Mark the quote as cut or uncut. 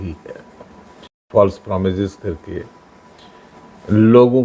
cut